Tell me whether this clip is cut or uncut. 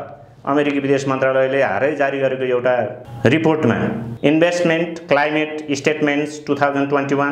cut